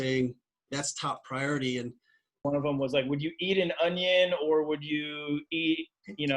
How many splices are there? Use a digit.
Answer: 1